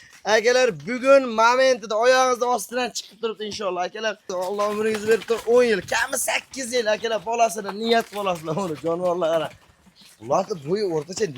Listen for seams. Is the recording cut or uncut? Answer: cut